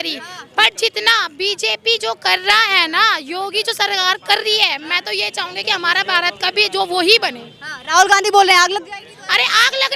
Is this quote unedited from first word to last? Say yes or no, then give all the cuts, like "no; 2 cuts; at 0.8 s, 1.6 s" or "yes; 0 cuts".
yes; 0 cuts